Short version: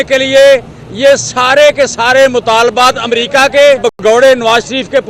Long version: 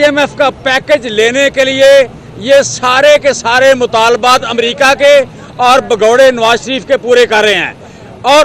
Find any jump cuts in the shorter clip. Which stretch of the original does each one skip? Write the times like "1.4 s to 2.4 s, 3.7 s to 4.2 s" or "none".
5.4 s to 5.9 s